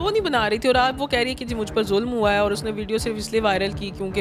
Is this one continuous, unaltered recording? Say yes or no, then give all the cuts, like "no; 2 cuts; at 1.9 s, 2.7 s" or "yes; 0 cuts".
yes; 0 cuts